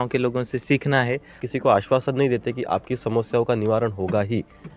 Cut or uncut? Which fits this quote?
cut